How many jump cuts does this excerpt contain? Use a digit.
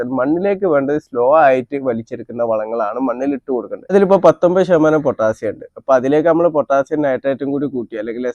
1